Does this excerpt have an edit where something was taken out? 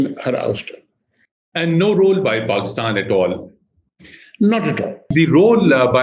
yes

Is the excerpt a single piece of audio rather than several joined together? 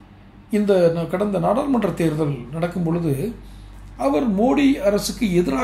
yes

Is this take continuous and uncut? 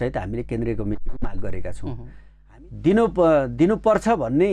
no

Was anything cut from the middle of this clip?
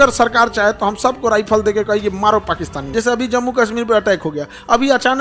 yes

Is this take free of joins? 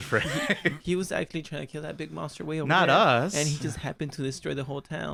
yes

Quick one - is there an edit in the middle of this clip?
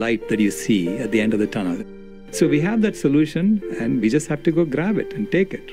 yes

